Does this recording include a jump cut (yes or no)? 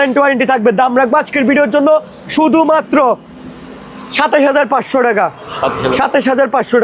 no